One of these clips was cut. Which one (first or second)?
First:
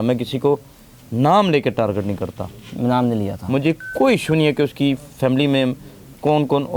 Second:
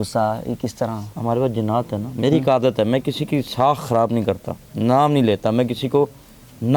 second